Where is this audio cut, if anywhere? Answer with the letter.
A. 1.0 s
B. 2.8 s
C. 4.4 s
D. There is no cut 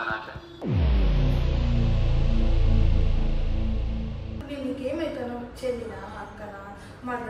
C